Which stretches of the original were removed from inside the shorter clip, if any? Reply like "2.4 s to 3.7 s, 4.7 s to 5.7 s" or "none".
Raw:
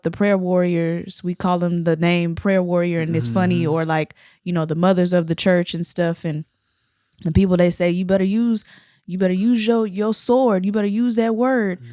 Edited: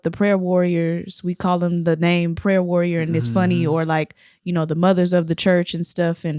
none